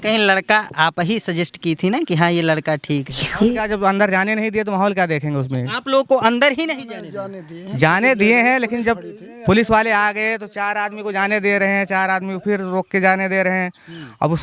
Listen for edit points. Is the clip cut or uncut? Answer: cut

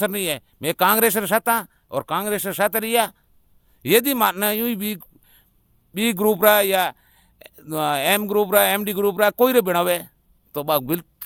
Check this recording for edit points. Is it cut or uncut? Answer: uncut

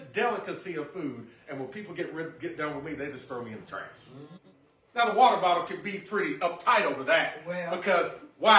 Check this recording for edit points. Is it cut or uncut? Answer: cut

